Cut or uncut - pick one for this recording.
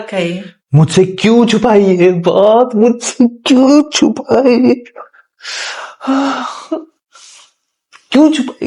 cut